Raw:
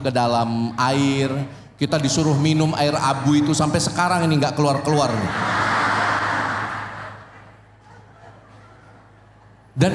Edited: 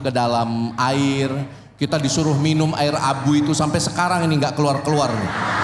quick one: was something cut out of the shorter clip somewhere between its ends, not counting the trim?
no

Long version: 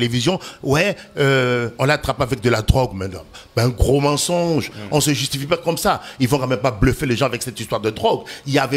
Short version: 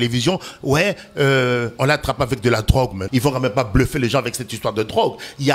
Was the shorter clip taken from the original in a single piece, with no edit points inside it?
no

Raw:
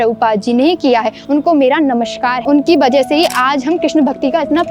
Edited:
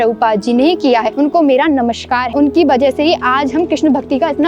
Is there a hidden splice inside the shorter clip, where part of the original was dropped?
yes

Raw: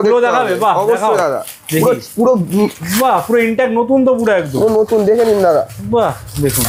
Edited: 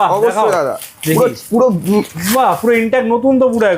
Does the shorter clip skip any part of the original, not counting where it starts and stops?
no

